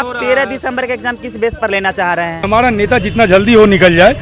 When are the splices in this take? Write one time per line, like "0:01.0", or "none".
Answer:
0:02.5

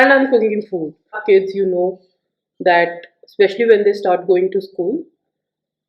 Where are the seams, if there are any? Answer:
0:01.2

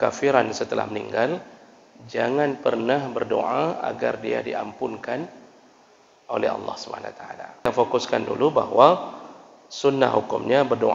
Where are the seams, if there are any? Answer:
0:07.7

